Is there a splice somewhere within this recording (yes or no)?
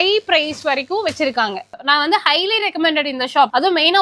yes